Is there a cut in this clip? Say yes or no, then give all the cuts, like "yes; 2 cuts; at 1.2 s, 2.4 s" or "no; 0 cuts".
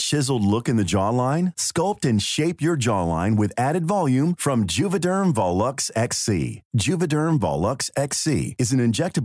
no; 0 cuts